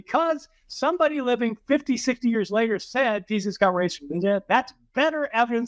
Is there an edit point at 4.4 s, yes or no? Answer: yes